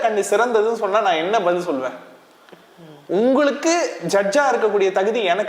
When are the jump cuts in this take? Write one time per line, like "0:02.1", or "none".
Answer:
none